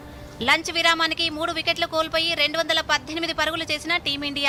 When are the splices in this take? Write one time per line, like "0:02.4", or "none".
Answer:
none